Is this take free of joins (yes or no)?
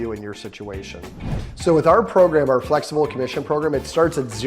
no